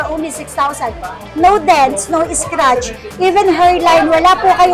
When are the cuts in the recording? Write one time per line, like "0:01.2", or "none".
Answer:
none